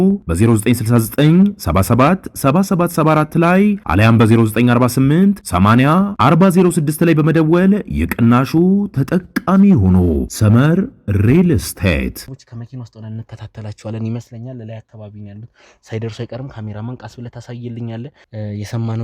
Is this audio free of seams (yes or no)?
no